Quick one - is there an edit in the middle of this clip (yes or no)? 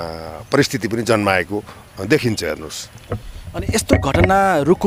no